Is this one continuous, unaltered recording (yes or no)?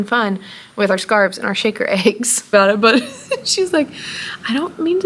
no